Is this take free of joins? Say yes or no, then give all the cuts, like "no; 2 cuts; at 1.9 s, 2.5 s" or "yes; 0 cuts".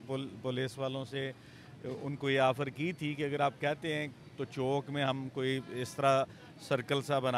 yes; 0 cuts